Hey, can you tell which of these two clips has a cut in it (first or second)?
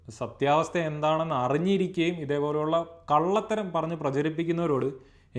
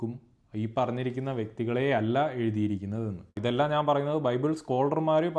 second